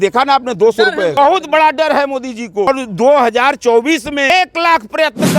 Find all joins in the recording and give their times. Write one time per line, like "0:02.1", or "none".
0:01.2
0:02.7
0:04.3